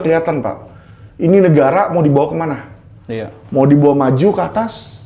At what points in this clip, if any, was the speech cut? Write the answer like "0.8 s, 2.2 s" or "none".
none